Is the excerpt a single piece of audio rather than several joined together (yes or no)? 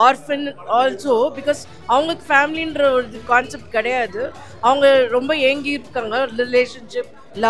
yes